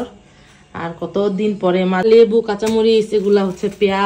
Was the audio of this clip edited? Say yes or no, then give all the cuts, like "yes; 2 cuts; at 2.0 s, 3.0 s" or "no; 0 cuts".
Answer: yes; 1 cut; at 2.0 s